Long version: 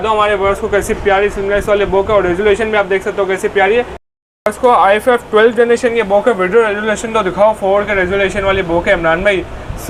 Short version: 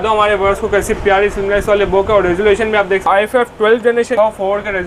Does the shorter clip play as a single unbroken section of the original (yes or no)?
no